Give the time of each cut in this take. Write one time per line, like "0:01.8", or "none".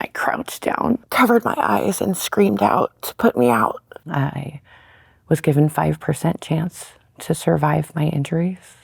0:01.1
0:03.9